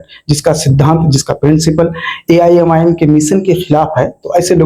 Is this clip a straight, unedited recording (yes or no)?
yes